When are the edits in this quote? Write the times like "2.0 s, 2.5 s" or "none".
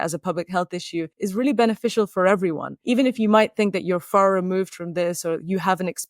1.1 s, 2.7 s